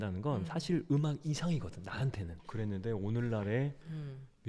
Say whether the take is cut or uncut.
cut